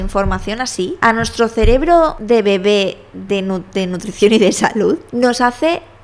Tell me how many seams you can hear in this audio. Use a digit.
3